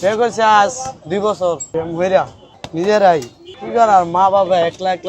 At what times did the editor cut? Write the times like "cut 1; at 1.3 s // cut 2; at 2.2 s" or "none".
cut 1; at 1.6 s // cut 2; at 2.4 s